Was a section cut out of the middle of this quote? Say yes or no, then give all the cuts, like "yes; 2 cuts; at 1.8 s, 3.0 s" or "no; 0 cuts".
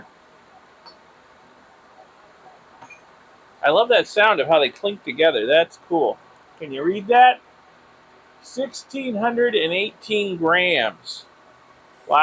no; 0 cuts